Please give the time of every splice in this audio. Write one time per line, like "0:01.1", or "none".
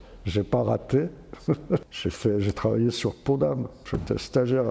0:01.9